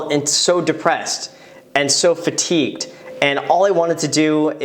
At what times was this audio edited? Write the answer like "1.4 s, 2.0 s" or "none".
none